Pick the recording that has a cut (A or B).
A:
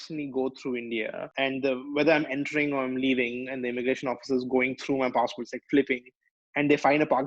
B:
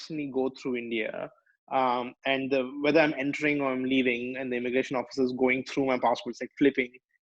A